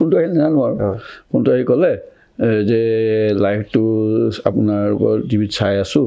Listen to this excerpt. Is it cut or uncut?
uncut